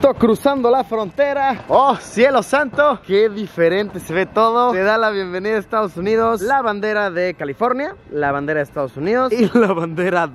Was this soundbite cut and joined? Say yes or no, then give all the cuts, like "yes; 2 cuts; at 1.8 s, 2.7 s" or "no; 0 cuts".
no; 0 cuts